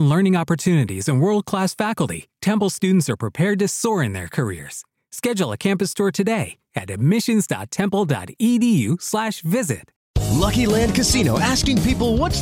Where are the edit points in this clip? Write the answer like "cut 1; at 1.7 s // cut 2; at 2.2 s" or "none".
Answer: cut 1; at 9.9 s